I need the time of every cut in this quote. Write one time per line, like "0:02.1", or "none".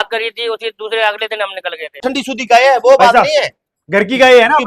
0:02.1